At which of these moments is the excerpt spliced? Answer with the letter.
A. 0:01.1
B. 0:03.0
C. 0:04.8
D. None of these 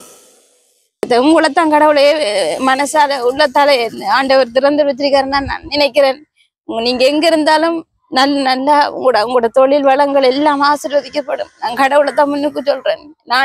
A